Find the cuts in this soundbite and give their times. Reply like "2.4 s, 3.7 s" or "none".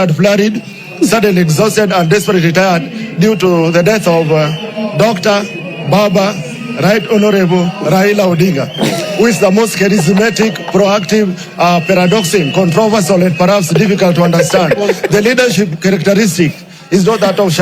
none